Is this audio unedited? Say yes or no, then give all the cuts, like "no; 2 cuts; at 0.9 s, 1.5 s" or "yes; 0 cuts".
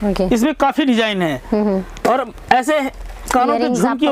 yes; 0 cuts